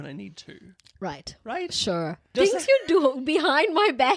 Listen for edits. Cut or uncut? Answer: cut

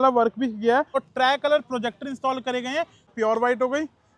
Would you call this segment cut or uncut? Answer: cut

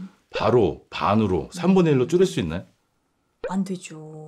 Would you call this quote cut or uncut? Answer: uncut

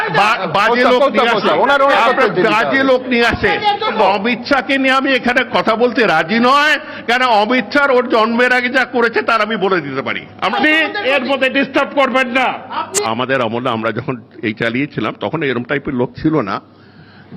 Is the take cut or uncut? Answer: cut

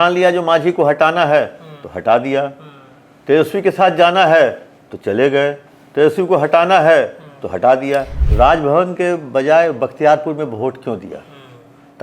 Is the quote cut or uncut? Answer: cut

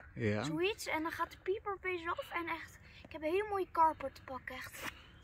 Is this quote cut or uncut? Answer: uncut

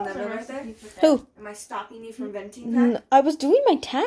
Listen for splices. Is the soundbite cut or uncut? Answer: uncut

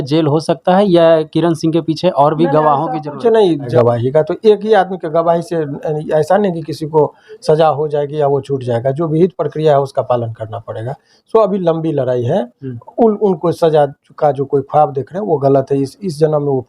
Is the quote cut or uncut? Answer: cut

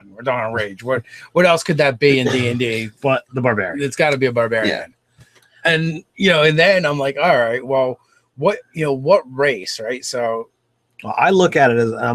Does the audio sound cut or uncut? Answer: uncut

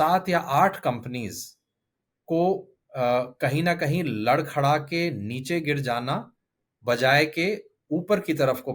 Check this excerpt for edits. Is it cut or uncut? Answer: uncut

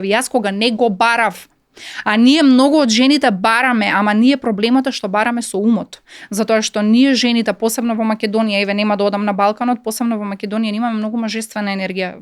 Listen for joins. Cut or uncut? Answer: uncut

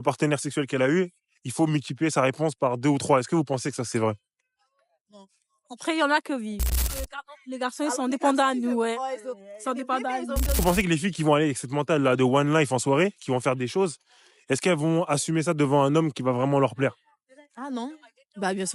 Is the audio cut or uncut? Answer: cut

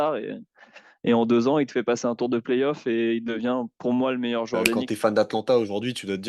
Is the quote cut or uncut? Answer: cut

